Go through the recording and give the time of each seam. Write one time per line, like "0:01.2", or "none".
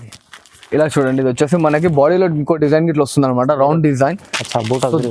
none